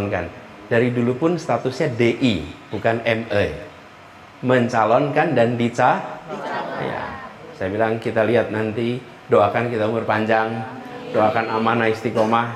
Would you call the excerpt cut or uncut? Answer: uncut